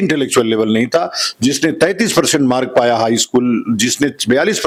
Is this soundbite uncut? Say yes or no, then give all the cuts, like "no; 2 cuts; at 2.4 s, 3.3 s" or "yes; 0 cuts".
yes; 0 cuts